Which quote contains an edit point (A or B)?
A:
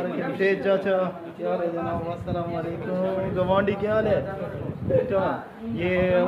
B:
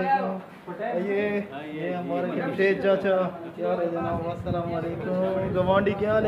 A